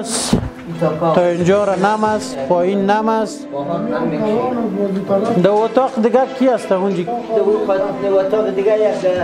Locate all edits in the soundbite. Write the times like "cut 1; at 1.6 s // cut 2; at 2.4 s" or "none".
none